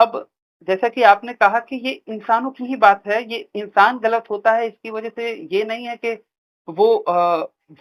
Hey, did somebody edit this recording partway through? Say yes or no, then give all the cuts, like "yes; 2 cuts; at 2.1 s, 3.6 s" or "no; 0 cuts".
no; 0 cuts